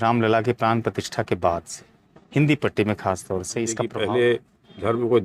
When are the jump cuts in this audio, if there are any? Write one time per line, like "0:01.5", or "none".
0:03.9